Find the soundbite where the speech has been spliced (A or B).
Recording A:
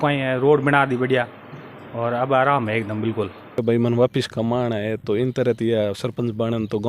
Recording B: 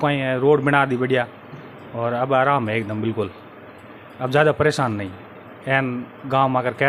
A